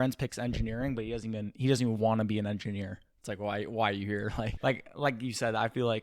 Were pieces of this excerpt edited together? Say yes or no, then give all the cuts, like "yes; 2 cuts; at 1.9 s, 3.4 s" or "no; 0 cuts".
yes; 1 cut; at 4.5 s